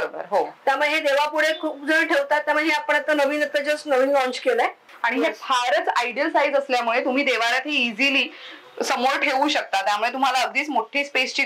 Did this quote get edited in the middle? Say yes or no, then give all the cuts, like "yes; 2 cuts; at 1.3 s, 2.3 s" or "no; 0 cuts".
yes; 1 cut; at 4.8 s